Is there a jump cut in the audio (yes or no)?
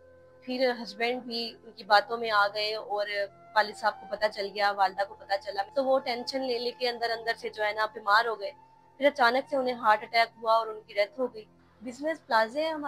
yes